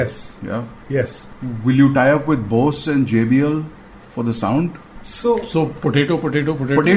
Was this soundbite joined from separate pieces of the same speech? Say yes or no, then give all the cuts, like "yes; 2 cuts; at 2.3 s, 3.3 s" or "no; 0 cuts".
yes; 1 cut; at 1.3 s